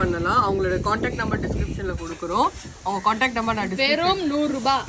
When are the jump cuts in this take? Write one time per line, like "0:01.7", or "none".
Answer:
none